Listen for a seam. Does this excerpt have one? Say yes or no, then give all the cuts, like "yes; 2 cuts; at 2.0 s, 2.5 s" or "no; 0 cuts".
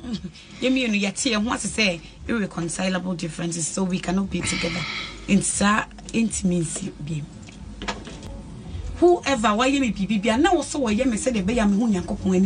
yes; 1 cut; at 8.2 s